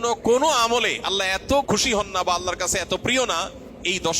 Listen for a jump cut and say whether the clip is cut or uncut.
cut